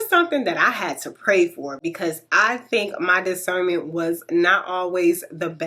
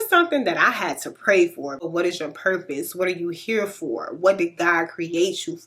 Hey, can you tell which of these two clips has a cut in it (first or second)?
second